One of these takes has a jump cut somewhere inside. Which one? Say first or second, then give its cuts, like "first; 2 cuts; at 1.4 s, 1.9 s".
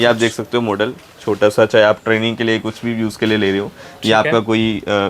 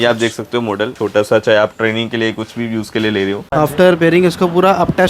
second; 2 cuts; at 0.9 s, 3.5 s